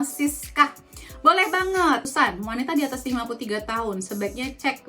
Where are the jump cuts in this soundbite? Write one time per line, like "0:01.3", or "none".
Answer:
0:02.3